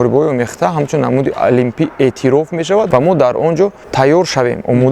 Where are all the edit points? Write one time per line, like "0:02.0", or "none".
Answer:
0:02.9
0:03.8